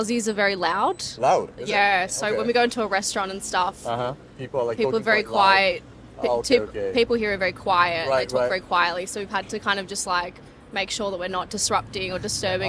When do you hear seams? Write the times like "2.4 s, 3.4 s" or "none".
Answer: none

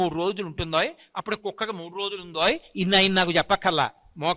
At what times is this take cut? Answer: none

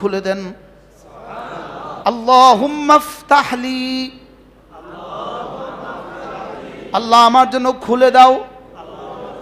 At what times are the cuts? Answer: 2.0 s

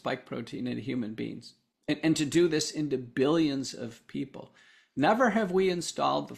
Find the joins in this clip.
none

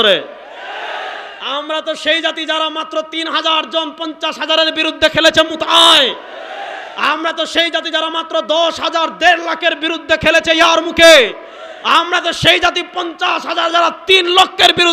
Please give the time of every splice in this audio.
none

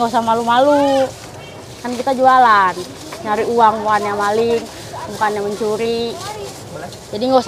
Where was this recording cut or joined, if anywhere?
none

